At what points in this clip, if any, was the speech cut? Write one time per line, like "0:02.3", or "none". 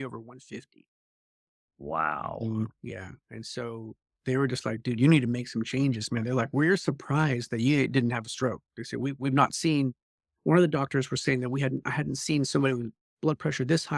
none